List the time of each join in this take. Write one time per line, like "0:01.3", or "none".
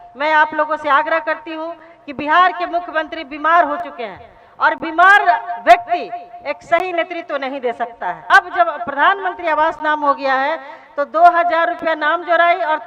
0:08.2